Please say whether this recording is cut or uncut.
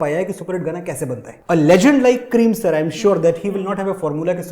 uncut